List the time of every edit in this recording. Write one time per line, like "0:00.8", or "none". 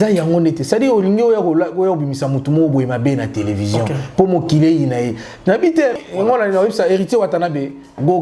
0:06.0